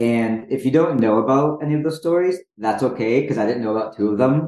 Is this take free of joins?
yes; 0 cuts

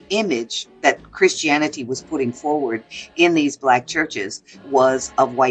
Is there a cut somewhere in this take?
no; 0 cuts

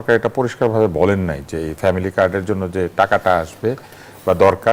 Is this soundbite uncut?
yes; 0 cuts

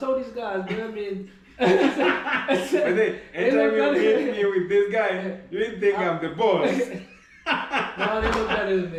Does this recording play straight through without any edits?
yes; 0 cuts

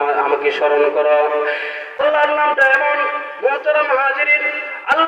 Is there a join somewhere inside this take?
yes; 1 cut; at 2.0 s

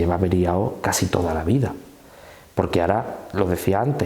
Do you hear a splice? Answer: no; 0 cuts

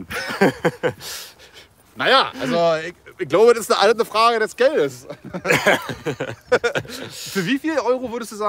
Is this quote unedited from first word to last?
yes; 0 cuts

